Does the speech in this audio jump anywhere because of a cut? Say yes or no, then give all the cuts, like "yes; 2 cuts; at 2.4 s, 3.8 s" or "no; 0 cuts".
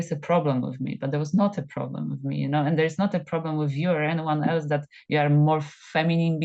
no; 0 cuts